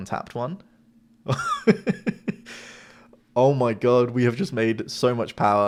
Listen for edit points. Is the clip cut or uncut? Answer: uncut